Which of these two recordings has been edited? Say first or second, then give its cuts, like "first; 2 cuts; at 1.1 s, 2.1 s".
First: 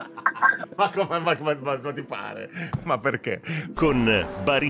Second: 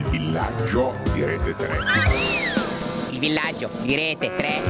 first; 1 cut; at 3.7 s